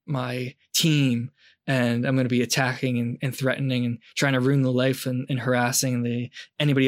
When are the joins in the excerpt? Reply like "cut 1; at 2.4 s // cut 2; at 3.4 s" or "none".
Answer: none